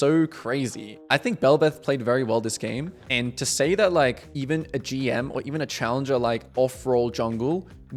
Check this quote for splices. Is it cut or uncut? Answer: uncut